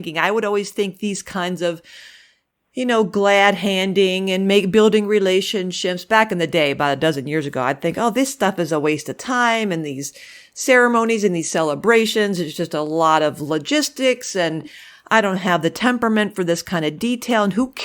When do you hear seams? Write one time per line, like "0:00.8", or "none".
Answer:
none

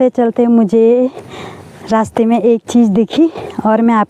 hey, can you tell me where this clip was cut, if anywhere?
none

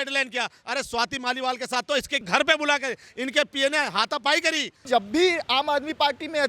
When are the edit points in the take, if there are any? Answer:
0:02.3
0:04.8

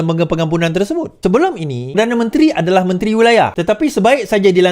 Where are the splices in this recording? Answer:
0:01.1
0:01.9
0:03.6

